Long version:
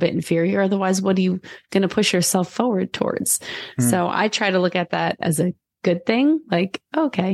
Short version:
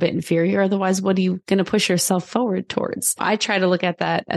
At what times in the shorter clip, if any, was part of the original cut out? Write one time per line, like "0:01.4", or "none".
0:01.4
0:03.2